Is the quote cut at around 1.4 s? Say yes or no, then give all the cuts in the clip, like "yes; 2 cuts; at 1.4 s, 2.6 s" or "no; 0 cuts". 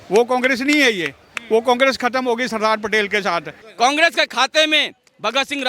no; 1 cut; at 3.6 s